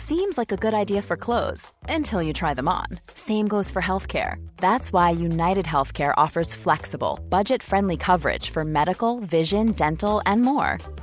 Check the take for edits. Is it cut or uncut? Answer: uncut